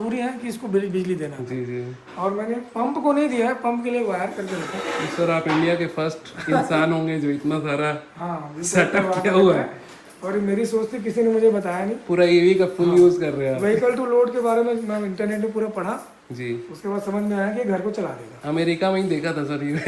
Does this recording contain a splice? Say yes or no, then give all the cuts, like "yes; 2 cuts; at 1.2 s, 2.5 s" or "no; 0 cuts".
no; 0 cuts